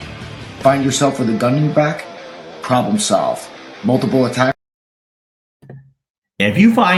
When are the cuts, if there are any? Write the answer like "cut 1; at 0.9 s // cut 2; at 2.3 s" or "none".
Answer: none